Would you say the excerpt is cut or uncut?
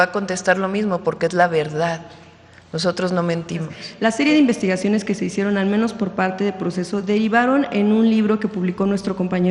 cut